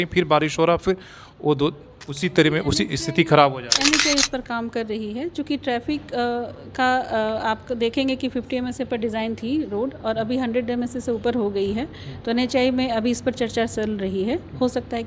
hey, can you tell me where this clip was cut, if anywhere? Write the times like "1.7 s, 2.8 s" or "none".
none